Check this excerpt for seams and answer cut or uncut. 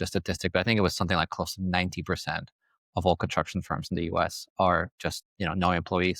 uncut